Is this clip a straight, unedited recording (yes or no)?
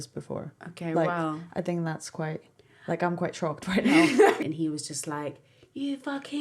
no